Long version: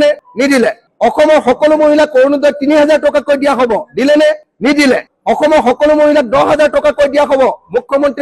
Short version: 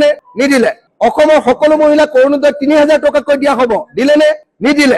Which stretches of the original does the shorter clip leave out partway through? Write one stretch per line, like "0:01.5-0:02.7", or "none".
none